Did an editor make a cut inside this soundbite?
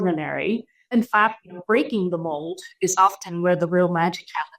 yes; 1 cut; at 0.9 s

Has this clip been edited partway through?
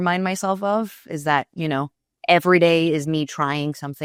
no; 0 cuts

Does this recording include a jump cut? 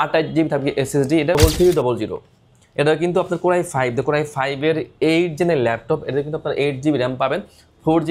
yes; 1 cut; at 1.4 s

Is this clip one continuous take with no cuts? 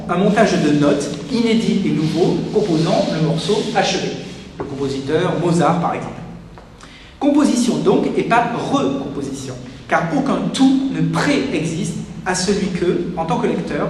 no; 1 cut; at 9.5 s

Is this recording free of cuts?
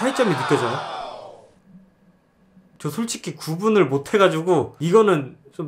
yes; 0 cuts

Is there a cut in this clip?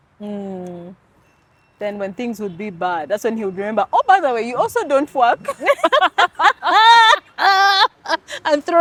no; 0 cuts

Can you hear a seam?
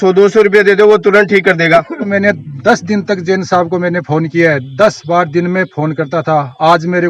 yes; 1 cut; at 2.1 s

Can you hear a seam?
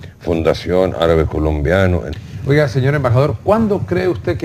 no; 0 cuts

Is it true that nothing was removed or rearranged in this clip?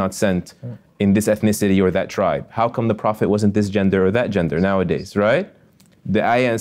yes; 0 cuts

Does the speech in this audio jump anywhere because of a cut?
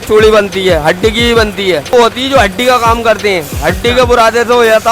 yes; 1 cut; at 1.9 s

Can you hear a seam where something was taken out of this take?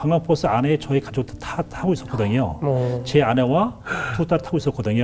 no; 0 cuts

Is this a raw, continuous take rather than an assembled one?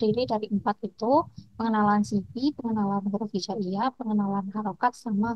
yes; 0 cuts

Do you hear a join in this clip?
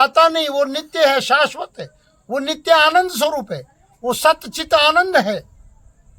no; 0 cuts

